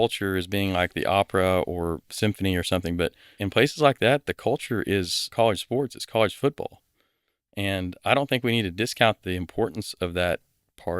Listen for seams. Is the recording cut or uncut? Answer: cut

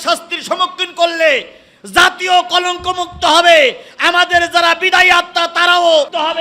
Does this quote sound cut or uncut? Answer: uncut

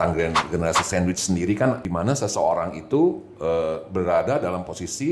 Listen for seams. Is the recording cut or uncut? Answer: cut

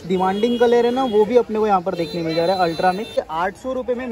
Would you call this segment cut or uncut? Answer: cut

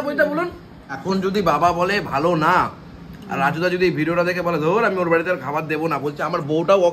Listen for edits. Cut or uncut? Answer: cut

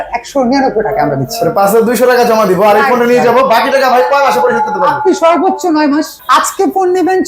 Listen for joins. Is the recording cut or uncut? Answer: cut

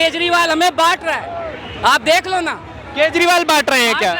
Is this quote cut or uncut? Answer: uncut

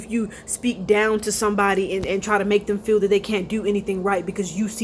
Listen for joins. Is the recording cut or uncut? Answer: uncut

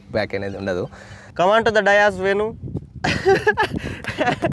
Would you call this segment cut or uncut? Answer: cut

